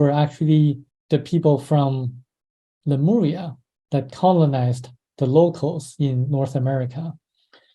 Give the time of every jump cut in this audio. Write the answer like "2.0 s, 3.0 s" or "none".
0.9 s